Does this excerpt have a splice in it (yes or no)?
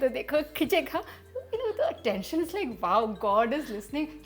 no